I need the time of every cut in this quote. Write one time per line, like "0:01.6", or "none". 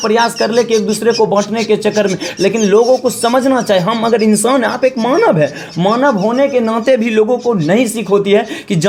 none